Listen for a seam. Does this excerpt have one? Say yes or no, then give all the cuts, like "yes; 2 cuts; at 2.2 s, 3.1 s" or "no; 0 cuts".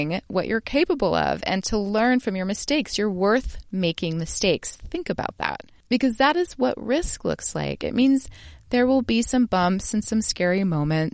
yes; 1 cut; at 5.7 s